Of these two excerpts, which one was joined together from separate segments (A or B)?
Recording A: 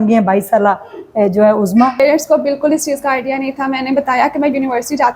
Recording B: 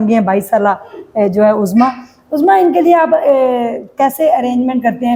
A